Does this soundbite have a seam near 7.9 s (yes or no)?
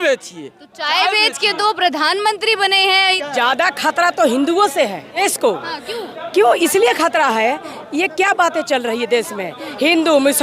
no